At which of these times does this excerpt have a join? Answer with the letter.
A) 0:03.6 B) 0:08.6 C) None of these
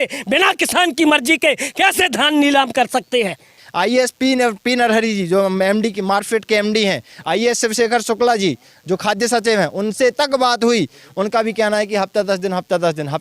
A